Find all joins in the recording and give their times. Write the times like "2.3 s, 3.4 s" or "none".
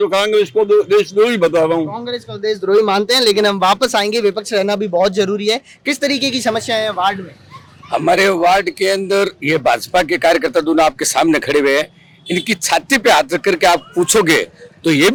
none